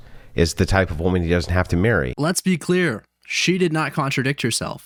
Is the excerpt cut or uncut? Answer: uncut